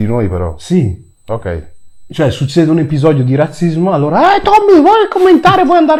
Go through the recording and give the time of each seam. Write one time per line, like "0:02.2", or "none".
none